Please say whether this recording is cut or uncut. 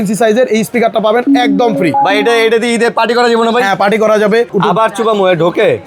cut